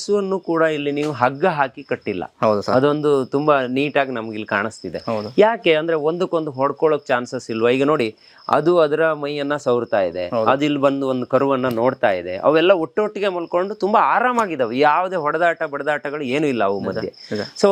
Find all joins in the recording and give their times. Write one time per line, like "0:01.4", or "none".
none

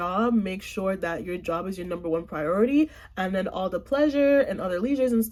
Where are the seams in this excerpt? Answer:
none

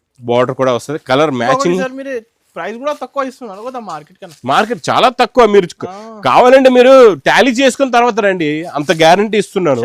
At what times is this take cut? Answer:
none

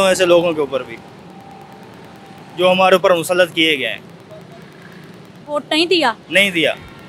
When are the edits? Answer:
none

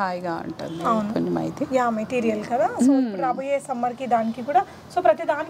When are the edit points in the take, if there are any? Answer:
none

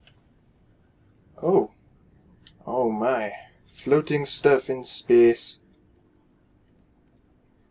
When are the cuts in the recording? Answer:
none

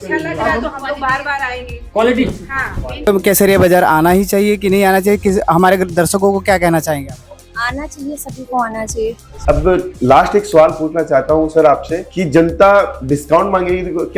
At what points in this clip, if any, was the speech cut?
0:09.4

